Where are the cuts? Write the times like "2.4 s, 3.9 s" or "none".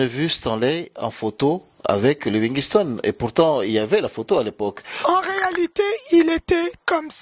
4.9 s